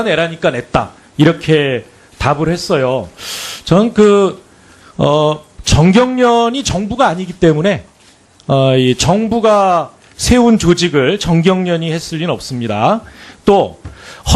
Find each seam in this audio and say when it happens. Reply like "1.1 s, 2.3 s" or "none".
7.1 s